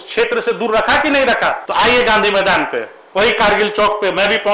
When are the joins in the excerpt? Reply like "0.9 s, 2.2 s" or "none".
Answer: 1.6 s